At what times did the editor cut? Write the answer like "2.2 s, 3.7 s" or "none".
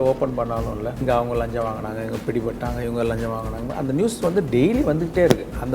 1.0 s